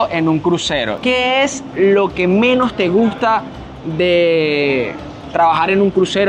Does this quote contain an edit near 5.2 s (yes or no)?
no